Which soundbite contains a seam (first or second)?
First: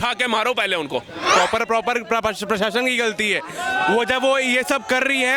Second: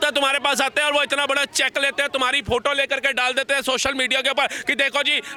first